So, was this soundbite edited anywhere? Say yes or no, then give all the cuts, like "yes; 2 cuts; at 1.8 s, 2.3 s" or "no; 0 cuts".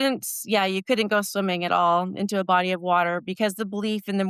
no; 0 cuts